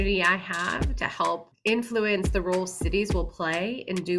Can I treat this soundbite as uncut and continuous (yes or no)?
no